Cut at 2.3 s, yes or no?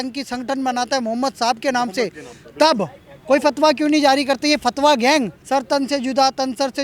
no